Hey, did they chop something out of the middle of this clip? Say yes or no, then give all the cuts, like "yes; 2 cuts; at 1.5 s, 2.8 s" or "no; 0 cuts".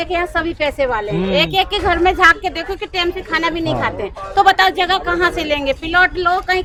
no; 0 cuts